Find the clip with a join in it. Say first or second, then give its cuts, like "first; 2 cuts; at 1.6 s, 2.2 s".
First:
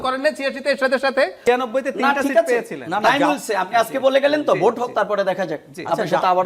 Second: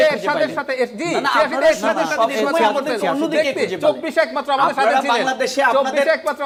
first; 1 cut; at 1.4 s